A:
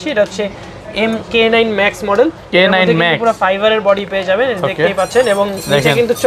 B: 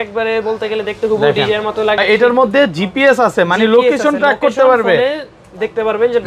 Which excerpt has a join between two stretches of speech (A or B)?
B